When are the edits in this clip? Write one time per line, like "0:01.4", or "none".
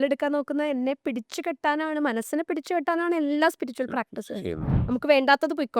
0:04.7